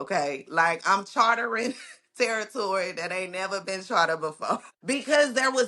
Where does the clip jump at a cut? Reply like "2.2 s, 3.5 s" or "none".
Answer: 4.7 s